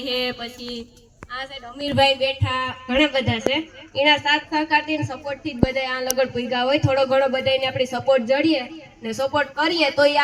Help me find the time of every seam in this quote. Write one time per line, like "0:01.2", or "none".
none